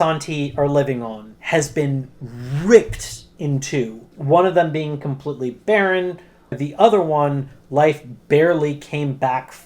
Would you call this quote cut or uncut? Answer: cut